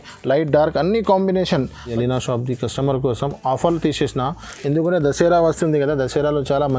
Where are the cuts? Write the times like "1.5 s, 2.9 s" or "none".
1.9 s